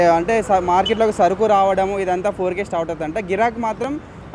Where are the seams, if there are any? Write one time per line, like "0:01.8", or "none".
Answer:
none